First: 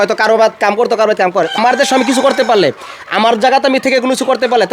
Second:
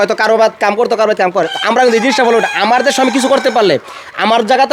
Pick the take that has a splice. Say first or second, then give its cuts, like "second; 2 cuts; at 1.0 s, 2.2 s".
first; 1 cut; at 1.5 s